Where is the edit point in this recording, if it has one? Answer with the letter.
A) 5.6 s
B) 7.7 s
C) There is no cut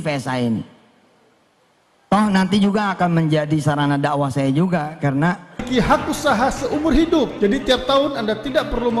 A